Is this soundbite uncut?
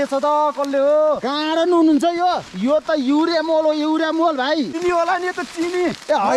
no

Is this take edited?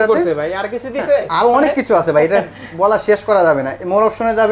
no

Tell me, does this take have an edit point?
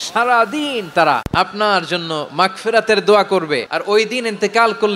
yes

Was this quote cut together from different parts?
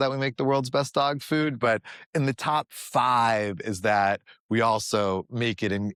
no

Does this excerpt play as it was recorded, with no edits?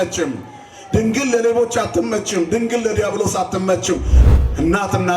no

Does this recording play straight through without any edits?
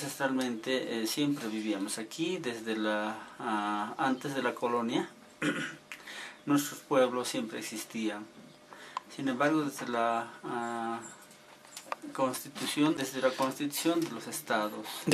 no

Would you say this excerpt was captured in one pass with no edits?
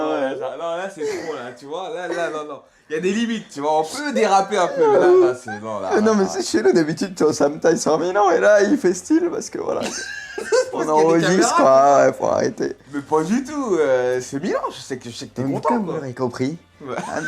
no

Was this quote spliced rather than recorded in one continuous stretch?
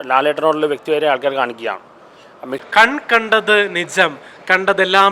yes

